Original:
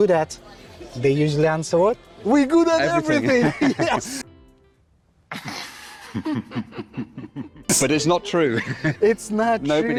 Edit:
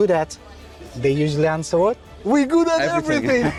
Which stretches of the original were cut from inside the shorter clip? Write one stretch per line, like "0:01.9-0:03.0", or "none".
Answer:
none